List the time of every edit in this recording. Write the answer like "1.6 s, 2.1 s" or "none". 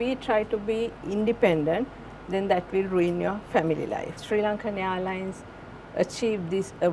4.1 s